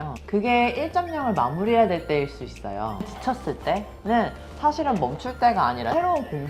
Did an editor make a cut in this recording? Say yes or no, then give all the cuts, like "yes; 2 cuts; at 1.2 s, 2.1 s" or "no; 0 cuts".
no; 0 cuts